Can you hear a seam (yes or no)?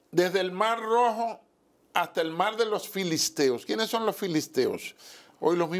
no